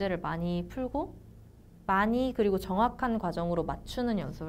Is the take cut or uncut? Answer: uncut